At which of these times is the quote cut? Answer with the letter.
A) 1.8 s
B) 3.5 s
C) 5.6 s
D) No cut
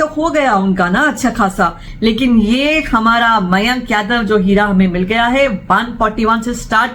A